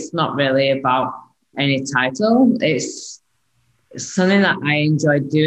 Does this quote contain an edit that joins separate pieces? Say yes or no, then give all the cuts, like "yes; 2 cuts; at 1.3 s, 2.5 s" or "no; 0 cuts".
yes; 1 cut; at 1.5 s